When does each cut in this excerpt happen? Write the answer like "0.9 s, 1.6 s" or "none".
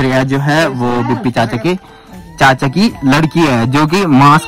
none